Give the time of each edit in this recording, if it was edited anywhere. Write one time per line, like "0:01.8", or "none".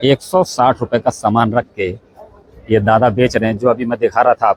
none